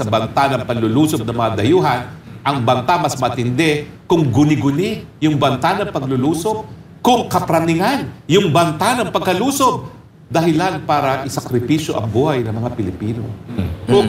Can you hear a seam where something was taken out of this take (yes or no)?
yes